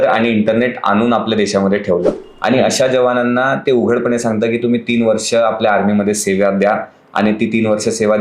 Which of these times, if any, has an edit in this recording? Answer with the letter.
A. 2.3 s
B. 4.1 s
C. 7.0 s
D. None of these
A